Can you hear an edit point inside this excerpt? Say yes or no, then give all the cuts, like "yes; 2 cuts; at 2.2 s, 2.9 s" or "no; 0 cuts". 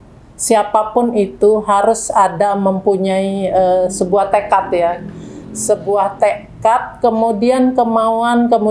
no; 0 cuts